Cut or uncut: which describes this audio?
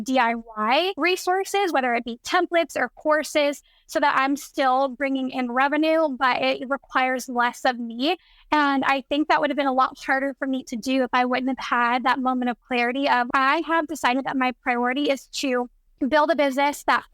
cut